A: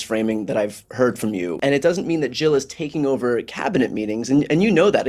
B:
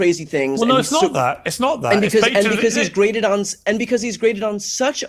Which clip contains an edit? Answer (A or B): A